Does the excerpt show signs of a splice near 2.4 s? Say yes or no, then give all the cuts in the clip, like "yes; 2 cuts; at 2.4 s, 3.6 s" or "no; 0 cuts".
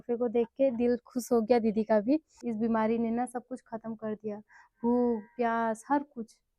yes; 1 cut; at 2.4 s